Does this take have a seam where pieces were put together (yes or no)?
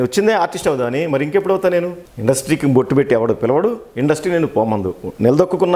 yes